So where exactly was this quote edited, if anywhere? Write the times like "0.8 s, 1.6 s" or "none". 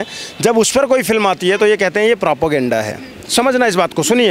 none